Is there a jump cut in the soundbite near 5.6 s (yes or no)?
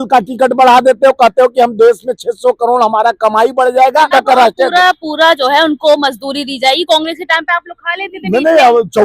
no